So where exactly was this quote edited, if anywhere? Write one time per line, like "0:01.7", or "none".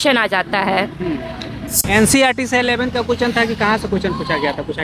0:01.7